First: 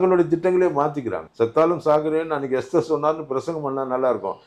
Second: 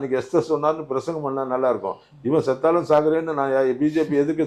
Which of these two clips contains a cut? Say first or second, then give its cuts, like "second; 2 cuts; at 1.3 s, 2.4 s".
first; 1 cut; at 1.2 s